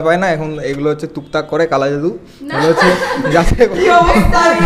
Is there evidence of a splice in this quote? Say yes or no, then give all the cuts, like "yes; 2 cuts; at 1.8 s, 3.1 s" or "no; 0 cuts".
no; 0 cuts